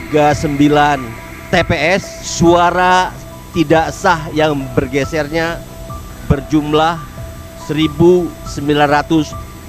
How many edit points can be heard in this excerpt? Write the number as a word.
one